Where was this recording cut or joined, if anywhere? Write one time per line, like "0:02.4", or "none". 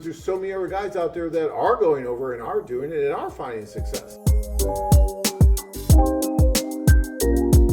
0:04.1